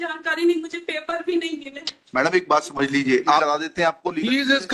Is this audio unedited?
no; 1 cut; at 3.4 s

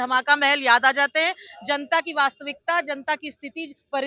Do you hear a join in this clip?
no; 0 cuts

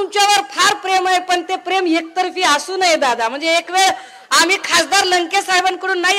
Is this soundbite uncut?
yes; 0 cuts

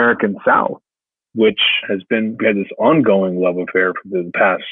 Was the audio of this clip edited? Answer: yes; 1 cut; at 2.3 s

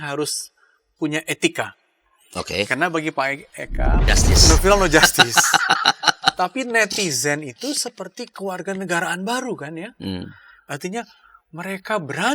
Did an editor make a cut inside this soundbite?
yes; 1 cut; at 4.1 s

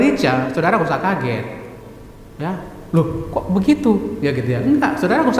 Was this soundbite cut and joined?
no; 0 cuts

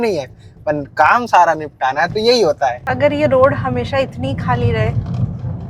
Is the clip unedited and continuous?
no; 1 cut; at 2.9 s

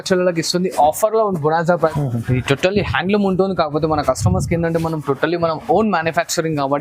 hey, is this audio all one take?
no; 1 cut; at 2.0 s

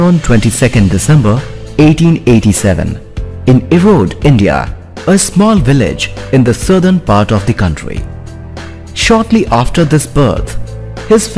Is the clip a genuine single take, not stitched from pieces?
yes; 0 cuts

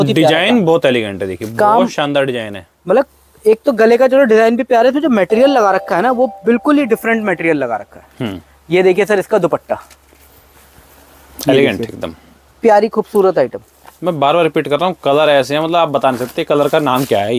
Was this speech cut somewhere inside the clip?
no; 0 cuts

